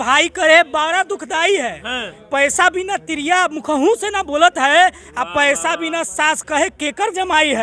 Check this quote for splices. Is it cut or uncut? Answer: uncut